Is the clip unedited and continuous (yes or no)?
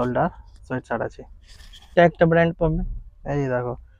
no